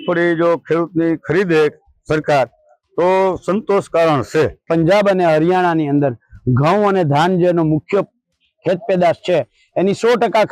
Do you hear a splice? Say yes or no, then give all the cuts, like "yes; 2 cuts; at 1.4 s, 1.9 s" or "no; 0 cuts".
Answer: yes; 1 cut; at 4.6 s